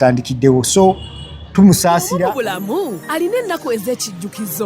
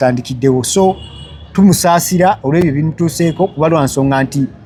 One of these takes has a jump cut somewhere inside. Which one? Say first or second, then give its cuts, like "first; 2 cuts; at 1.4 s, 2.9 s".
first; 1 cut; at 2.1 s